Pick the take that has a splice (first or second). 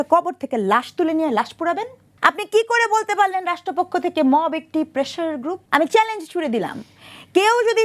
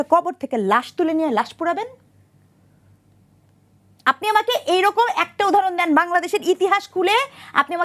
first